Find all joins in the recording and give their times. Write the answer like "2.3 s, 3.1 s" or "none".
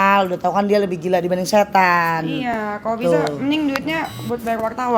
none